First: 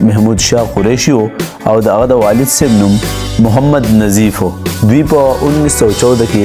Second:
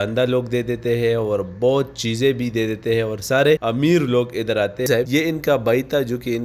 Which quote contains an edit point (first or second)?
second